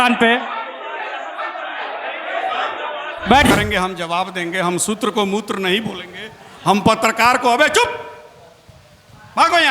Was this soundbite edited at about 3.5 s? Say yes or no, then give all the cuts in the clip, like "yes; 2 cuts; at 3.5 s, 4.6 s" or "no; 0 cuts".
yes; 1 cut; at 3.5 s